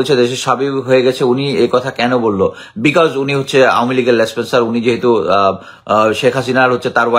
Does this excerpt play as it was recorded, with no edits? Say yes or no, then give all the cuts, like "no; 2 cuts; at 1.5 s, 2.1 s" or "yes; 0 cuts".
yes; 0 cuts